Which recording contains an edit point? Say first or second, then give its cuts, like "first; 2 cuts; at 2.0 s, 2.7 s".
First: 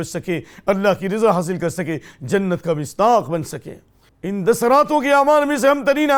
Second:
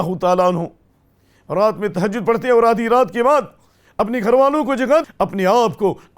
second; 1 cut; at 5.1 s